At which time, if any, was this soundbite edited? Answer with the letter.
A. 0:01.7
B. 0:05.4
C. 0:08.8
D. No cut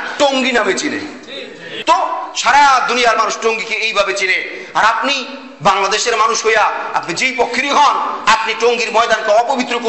A